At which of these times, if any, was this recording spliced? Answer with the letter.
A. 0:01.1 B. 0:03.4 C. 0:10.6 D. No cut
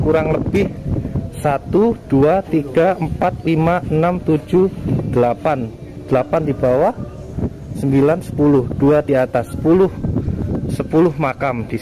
D